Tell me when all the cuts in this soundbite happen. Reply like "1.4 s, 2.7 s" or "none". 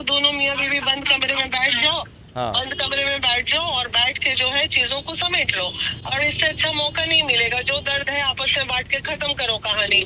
none